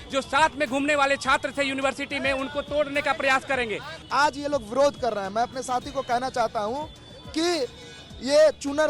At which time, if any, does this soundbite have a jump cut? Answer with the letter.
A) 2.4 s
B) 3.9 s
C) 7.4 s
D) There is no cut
B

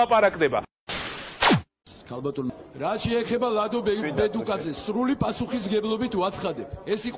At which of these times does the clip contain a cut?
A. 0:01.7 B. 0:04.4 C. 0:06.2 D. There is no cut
A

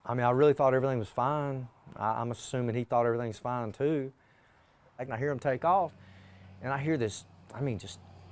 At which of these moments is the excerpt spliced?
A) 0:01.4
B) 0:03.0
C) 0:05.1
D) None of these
C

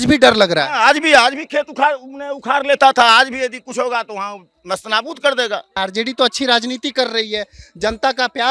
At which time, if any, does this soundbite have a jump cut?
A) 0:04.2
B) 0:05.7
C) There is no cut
B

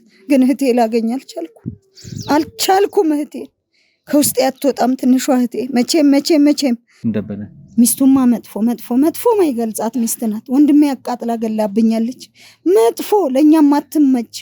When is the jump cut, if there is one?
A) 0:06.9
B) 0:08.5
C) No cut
A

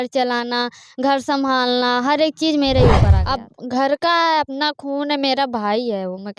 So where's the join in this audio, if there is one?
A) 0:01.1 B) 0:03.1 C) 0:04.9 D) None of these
B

